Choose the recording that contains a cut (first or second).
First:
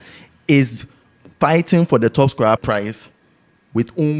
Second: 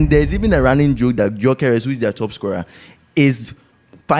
first